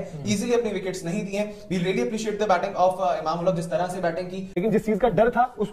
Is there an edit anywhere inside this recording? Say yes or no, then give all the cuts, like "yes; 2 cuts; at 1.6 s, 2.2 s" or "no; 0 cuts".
yes; 1 cut; at 4.4 s